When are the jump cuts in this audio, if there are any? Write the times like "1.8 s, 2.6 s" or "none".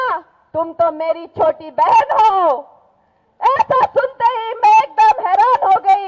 none